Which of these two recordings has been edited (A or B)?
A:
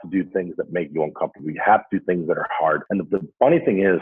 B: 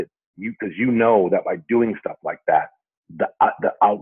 A